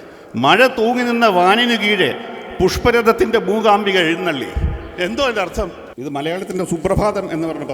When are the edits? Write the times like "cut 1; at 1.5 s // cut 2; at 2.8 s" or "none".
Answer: cut 1; at 5.9 s